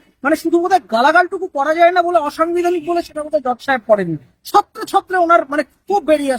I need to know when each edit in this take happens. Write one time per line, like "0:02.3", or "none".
none

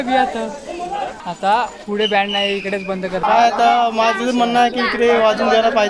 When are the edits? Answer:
0:01.2
0:03.2

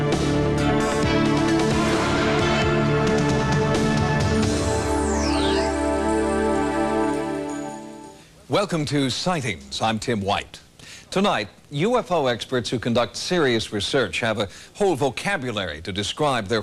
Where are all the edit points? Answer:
0:12.4

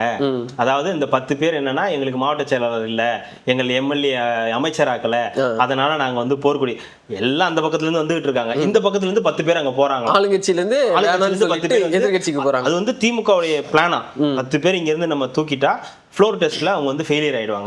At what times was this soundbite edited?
none

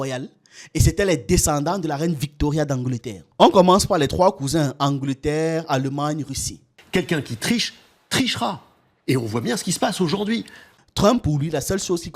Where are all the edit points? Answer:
0:06.6
0:10.6

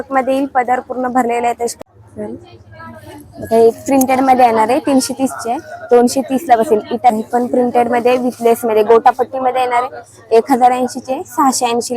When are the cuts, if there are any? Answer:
0:01.7
0:07.1

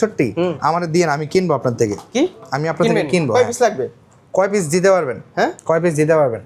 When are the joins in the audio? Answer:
none

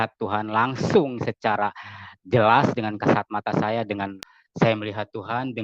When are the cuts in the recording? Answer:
0:04.2

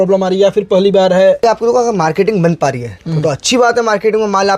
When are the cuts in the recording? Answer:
0:01.4

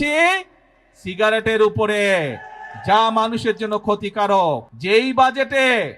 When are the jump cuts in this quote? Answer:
0:04.7

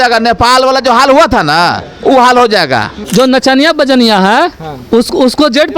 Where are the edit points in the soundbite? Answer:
0:03.1

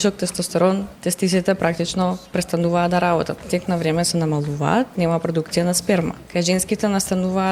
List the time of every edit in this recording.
0:00.9
0:03.5
0:04.9
0:06.2

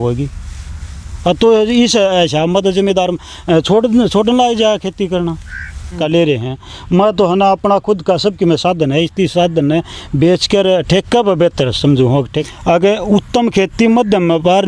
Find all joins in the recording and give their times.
0:06.0
0:12.4

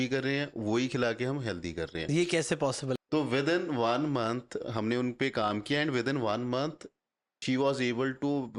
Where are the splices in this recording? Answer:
0:03.0

